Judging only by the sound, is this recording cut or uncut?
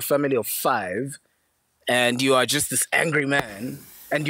uncut